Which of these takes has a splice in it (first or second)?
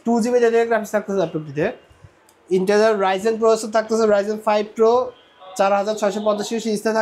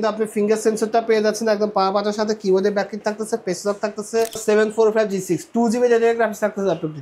second